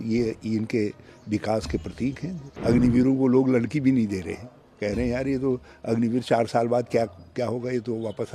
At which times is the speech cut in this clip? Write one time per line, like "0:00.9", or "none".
0:02.5